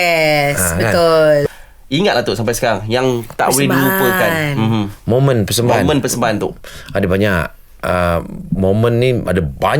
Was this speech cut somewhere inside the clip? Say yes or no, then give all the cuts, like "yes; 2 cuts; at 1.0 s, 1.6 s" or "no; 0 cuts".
yes; 1 cut; at 1.5 s